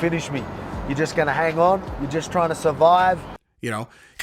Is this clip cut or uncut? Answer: uncut